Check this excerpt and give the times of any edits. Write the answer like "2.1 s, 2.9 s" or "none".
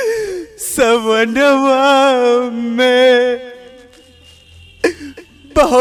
none